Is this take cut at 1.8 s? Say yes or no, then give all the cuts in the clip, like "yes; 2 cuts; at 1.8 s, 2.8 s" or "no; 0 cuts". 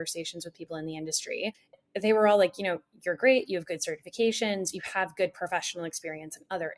yes; 1 cut; at 1.8 s